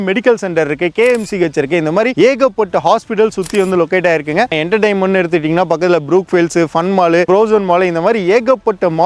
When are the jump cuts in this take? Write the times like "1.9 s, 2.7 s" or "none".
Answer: 4.5 s, 7.3 s